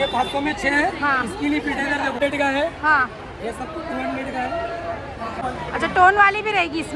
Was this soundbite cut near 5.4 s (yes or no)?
yes